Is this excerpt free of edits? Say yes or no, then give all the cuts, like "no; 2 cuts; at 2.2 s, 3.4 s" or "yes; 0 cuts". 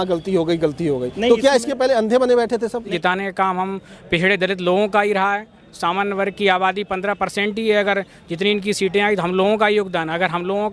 no; 1 cut; at 2.9 s